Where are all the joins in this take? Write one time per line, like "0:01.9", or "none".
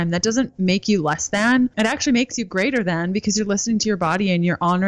0:01.7